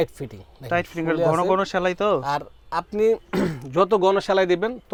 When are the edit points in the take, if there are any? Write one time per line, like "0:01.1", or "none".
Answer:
none